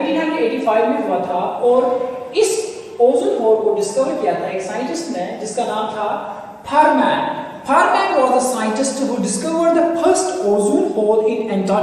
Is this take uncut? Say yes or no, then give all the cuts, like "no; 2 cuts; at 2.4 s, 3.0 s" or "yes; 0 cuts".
no; 1 cut; at 1.4 s